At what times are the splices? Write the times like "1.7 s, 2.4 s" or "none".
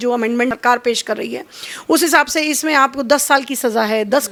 none